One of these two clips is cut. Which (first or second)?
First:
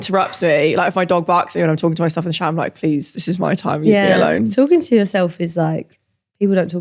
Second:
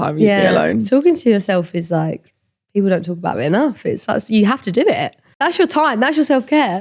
second